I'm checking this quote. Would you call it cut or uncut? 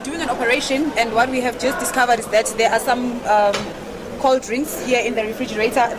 uncut